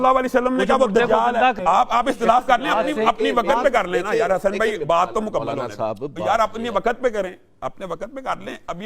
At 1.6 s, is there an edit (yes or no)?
yes